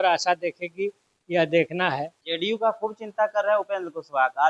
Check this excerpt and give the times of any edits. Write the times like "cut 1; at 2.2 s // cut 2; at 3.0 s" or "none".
cut 1; at 2.2 s